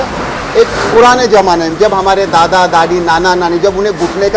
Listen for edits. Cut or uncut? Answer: uncut